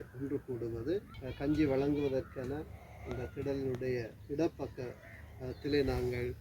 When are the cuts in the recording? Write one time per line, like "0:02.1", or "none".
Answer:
0:01.2